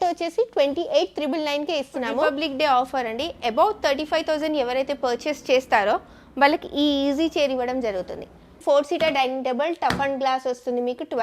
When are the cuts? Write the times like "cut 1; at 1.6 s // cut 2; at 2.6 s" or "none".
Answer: cut 1; at 2.3 s // cut 2; at 8.6 s